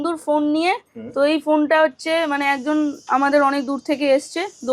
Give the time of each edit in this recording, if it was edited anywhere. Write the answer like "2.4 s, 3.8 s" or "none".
none